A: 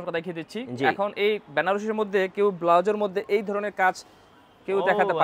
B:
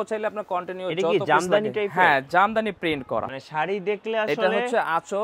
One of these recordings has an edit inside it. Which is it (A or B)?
B